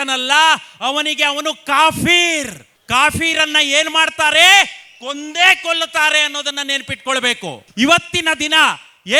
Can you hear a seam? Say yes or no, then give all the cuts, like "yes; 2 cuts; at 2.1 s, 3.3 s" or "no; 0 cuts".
no; 0 cuts